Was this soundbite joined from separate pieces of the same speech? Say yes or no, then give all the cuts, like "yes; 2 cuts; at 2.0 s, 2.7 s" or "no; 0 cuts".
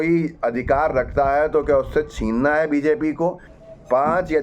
yes; 1 cut; at 3.5 s